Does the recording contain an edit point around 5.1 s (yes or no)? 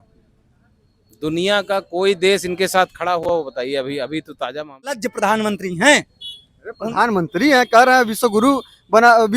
yes